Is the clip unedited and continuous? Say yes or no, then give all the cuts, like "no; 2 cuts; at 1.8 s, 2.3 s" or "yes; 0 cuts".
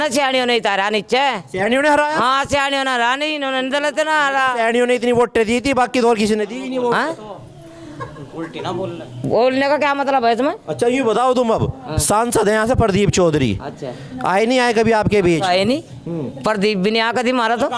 yes; 0 cuts